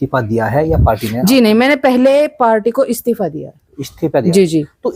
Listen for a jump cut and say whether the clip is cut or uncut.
uncut